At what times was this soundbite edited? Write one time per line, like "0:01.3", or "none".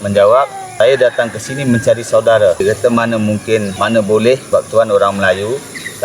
0:00.7
0:02.6
0:03.7
0:04.4